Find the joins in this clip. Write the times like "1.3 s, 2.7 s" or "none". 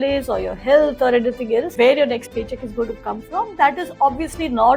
1.7 s

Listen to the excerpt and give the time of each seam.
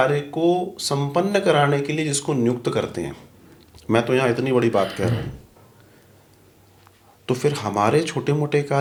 none

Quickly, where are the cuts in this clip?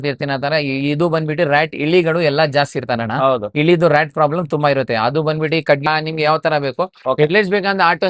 5.9 s

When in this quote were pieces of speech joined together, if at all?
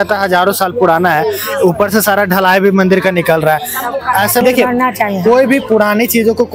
4.4 s

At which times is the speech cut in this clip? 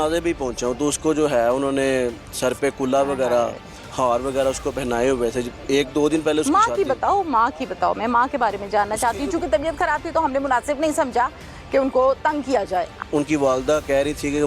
13.0 s

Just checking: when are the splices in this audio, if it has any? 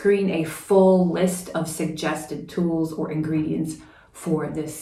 none

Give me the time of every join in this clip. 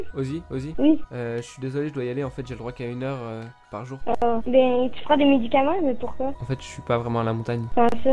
none

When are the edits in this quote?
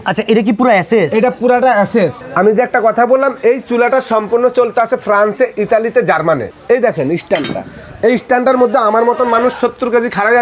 2.2 s, 6.4 s

